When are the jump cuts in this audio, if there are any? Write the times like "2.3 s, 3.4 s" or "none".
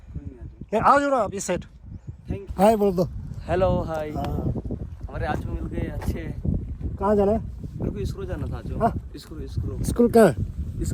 2.5 s